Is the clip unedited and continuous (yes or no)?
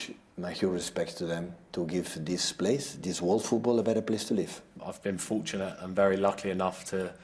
yes